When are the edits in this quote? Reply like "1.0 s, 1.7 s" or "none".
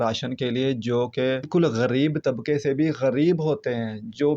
1.5 s